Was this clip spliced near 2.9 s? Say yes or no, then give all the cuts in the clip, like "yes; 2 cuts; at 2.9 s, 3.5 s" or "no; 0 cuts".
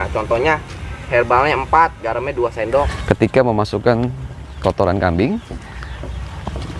yes; 1 cut; at 2.9 s